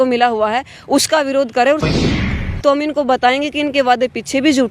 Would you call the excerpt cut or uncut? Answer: cut